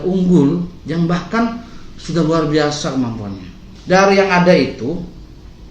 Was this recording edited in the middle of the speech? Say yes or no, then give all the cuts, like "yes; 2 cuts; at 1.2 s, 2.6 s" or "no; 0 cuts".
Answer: yes; 1 cut; at 3.7 s